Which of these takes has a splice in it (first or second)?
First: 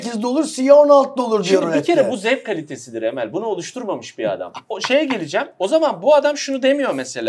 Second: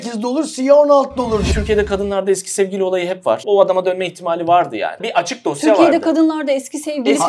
second